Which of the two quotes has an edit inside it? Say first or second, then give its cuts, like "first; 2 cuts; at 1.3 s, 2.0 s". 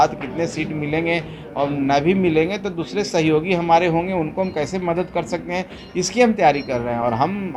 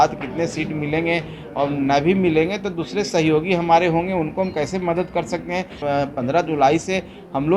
second; 1 cut; at 5.8 s